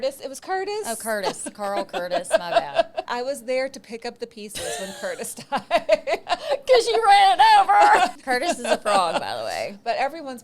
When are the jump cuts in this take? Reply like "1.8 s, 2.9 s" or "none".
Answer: 3.1 s, 6.2 s, 8.1 s